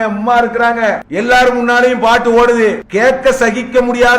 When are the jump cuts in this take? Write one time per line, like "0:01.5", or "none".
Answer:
0:01.0
0:02.8